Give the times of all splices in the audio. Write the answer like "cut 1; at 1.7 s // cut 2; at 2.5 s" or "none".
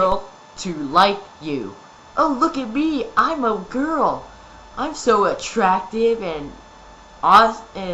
cut 1; at 2.1 s